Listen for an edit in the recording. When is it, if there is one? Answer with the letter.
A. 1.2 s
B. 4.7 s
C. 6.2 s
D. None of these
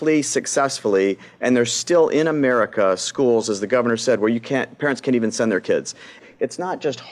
C